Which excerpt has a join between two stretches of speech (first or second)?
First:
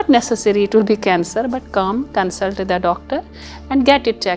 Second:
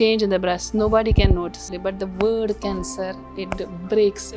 second